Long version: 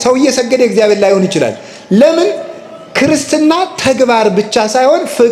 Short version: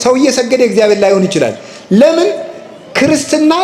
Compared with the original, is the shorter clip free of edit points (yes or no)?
yes